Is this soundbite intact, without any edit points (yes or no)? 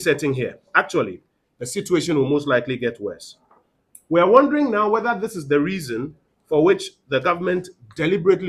yes